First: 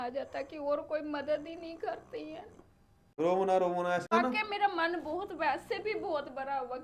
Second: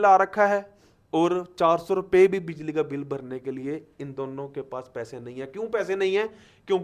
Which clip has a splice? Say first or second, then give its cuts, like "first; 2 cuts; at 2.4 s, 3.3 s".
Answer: first; 2 cuts; at 3.2 s, 4.1 s